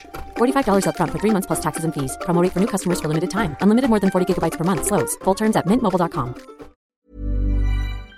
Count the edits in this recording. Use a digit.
1